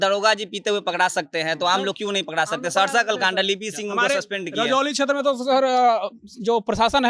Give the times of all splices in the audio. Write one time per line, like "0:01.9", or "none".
none